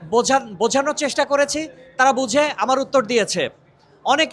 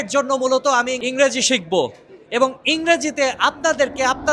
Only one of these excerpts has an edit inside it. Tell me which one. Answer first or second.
second